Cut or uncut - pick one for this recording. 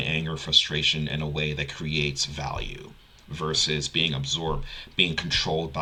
uncut